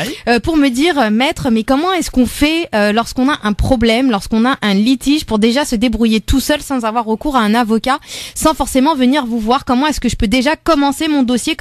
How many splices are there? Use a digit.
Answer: 0